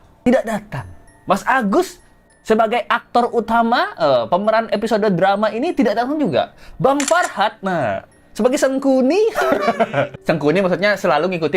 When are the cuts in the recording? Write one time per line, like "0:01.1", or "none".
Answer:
none